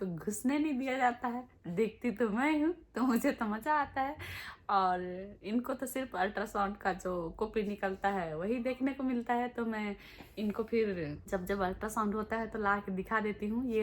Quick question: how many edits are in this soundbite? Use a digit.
1